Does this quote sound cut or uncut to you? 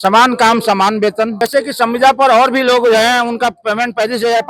cut